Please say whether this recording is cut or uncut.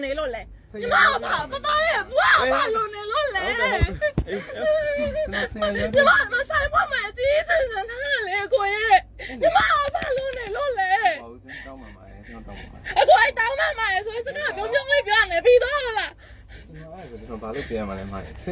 uncut